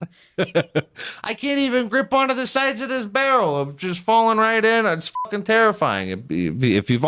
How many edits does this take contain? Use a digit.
0